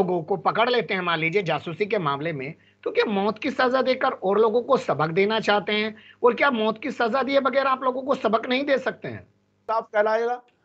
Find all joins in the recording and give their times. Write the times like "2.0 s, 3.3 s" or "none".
9.6 s

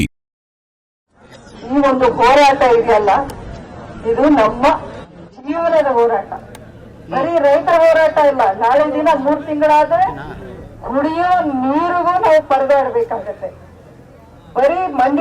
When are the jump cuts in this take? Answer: 1.0 s

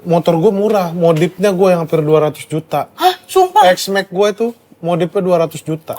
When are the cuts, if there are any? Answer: none

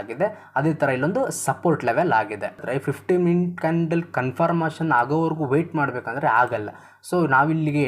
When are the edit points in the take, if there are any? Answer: 2.6 s

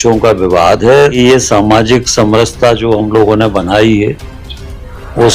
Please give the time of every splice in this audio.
1.2 s

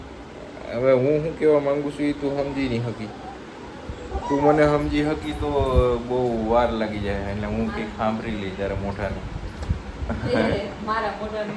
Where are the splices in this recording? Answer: none

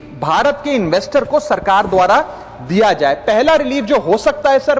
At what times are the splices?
none

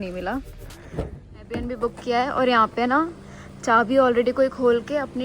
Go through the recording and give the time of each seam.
1.6 s

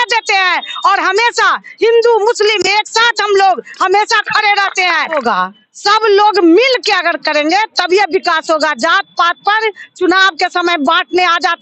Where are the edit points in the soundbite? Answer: 5.2 s

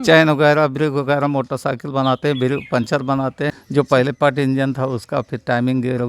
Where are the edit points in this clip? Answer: 3.5 s

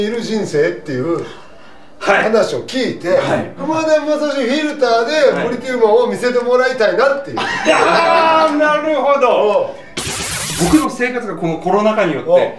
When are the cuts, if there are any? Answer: 3.6 s, 10.1 s

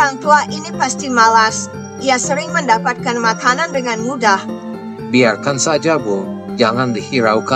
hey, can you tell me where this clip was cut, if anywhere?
none

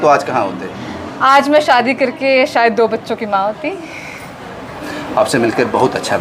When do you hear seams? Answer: none

